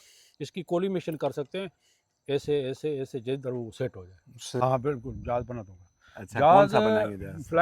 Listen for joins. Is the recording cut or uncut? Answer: cut